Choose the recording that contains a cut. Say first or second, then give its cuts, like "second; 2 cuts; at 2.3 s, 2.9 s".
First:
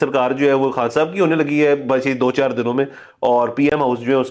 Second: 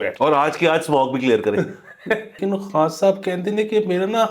second; 1 cut; at 2.4 s